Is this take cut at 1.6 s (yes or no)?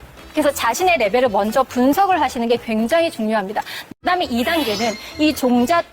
no